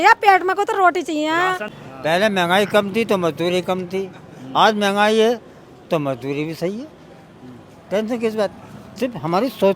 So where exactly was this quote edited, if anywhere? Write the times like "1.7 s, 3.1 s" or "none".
1.6 s